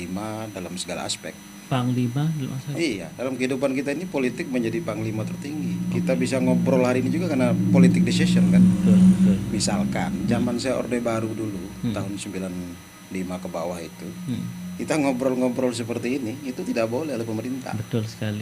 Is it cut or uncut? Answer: uncut